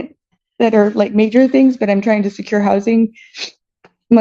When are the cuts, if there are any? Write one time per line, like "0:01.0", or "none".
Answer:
none